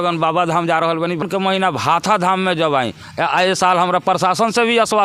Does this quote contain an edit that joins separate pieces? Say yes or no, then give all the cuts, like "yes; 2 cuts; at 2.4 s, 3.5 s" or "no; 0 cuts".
yes; 1 cut; at 1.3 s